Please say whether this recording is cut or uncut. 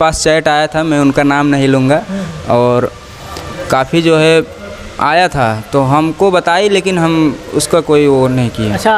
uncut